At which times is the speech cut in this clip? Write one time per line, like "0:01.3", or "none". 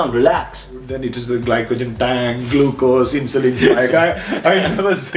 0:00.9